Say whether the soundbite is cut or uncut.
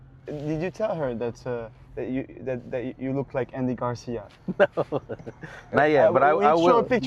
uncut